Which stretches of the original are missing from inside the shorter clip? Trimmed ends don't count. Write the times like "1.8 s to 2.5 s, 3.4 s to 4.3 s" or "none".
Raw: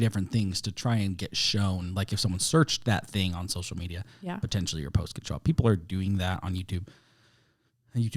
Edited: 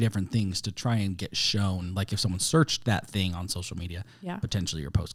none